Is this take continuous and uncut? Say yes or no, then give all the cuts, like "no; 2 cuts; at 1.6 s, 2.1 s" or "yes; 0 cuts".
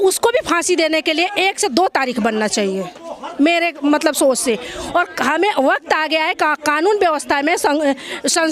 yes; 0 cuts